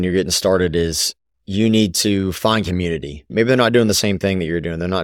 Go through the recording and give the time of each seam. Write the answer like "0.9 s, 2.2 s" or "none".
3.3 s